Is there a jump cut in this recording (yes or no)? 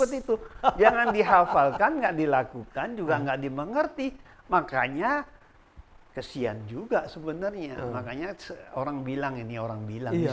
no